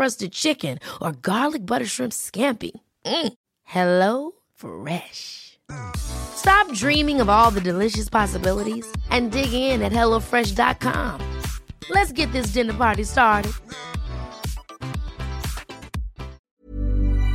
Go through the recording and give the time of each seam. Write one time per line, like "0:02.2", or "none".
0:16.4